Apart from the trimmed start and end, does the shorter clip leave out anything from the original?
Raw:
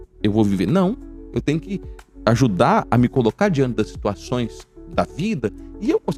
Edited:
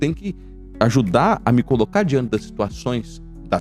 no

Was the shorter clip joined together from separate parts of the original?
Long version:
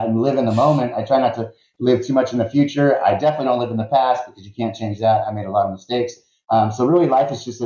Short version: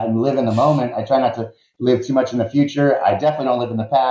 no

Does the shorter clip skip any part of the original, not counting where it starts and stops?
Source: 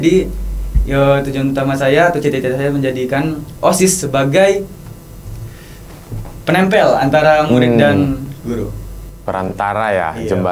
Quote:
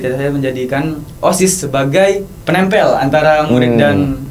yes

